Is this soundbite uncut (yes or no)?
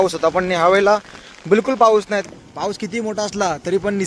no